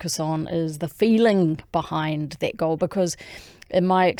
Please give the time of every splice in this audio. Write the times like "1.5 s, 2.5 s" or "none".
none